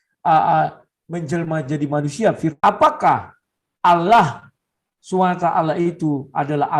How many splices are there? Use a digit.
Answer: 1